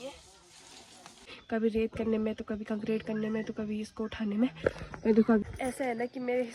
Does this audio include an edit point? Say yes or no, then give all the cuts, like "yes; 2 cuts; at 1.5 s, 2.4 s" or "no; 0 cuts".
yes; 2 cuts; at 1.2 s, 5.4 s